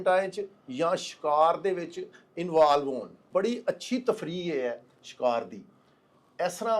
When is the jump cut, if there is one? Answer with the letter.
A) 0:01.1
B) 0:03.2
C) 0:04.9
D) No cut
B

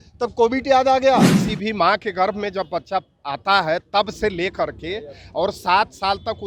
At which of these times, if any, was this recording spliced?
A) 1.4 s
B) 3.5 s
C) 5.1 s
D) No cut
A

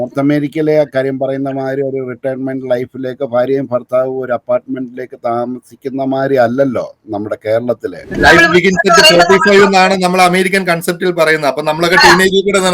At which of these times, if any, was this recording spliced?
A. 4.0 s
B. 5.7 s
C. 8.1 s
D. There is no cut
C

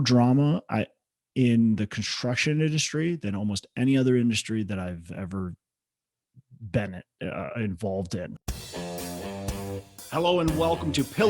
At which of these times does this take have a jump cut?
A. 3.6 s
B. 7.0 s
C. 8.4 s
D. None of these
C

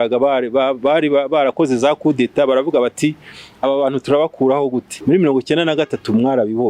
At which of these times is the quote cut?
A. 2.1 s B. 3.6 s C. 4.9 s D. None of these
C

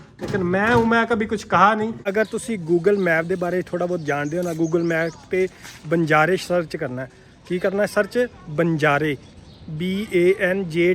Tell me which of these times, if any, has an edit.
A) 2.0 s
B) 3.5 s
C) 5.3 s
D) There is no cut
A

